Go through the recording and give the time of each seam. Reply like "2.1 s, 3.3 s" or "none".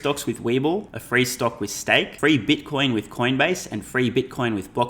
1.0 s, 2.1 s